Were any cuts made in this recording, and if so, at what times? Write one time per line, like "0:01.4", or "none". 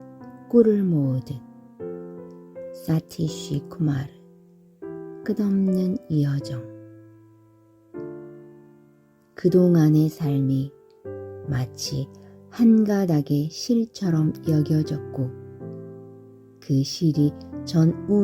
0:01.3
0:02.7